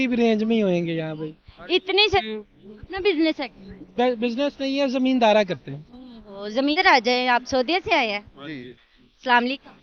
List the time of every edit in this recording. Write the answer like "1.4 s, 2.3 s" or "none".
2.2 s, 6.7 s